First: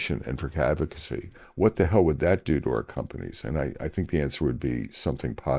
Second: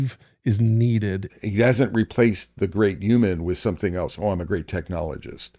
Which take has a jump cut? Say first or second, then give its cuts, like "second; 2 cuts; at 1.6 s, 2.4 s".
second; 1 cut; at 1.3 s